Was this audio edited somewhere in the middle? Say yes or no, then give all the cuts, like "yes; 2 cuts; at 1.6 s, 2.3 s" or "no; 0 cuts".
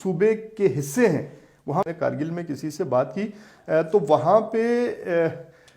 yes; 1 cut; at 1.9 s